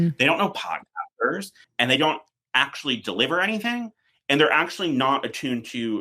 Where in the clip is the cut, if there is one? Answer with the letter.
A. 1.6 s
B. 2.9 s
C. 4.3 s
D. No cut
A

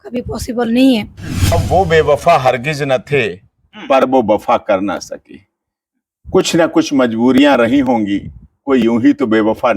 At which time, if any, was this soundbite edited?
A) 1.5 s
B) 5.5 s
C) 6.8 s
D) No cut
A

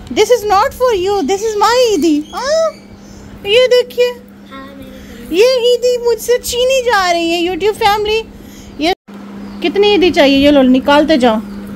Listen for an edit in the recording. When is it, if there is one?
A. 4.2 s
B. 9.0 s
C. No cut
B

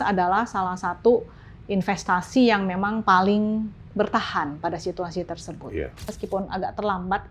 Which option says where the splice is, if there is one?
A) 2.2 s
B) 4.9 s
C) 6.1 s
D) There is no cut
C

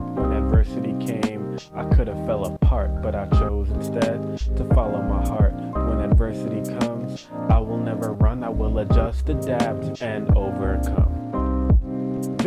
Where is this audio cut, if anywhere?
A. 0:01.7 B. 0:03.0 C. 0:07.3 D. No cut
D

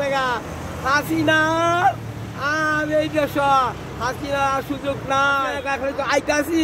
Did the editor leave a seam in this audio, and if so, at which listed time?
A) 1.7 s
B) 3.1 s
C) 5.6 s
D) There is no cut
C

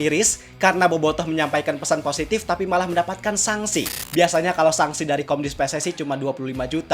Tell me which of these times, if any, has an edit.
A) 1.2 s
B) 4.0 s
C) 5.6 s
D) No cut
B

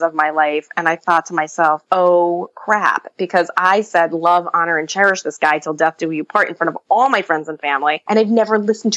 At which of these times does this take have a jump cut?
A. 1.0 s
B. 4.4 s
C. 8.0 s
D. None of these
C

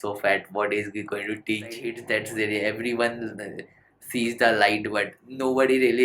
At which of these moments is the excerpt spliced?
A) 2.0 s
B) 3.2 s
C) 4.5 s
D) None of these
A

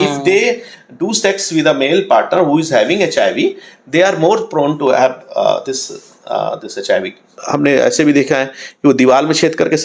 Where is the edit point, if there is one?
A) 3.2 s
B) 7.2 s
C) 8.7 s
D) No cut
B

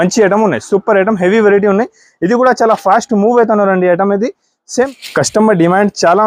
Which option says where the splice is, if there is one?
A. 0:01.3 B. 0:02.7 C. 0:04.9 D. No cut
C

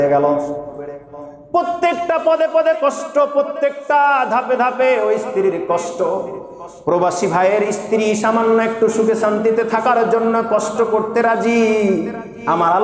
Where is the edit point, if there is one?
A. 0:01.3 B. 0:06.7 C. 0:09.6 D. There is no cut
D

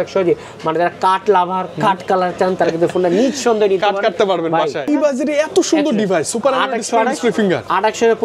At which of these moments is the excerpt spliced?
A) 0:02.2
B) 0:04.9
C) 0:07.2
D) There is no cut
B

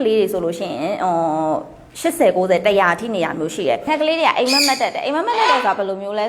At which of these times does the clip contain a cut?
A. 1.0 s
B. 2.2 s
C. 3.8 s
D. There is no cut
C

